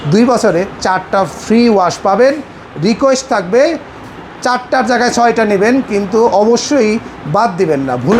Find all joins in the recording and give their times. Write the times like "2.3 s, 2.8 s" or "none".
none